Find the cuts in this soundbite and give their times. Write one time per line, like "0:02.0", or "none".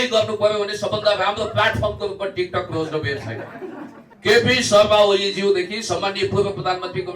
0:04.1